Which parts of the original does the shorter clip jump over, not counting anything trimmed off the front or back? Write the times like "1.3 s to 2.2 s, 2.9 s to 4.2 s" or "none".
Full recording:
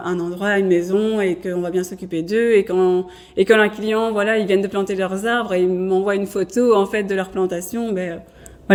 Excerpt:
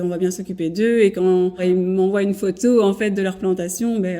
3.1 s to 5.5 s